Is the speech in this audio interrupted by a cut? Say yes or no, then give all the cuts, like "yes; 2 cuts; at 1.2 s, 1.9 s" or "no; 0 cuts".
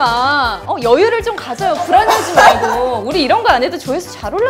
no; 0 cuts